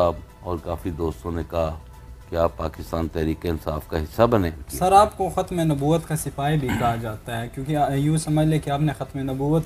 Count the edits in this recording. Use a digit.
1